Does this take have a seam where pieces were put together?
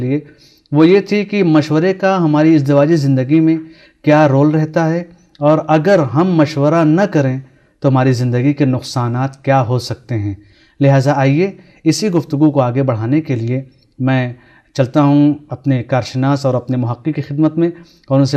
no; 0 cuts

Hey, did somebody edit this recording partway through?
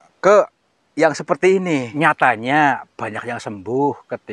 yes; 1 cut; at 1.9 s

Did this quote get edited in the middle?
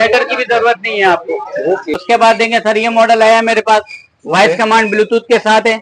yes; 1 cut; at 1.9 s

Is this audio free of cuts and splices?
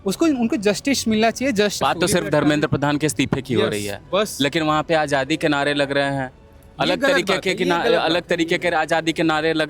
no; 1 cut; at 1.8 s

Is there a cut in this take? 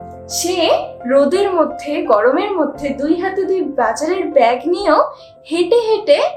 no; 0 cuts

